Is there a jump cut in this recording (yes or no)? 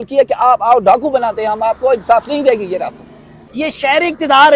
yes